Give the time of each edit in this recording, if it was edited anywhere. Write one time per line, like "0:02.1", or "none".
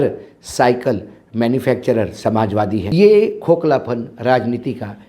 0:02.9